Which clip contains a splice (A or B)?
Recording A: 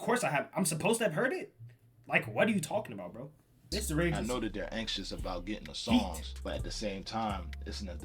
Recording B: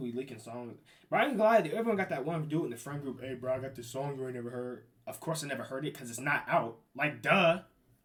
A